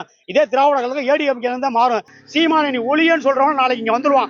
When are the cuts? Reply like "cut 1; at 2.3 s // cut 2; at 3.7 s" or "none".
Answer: cut 1; at 2.1 s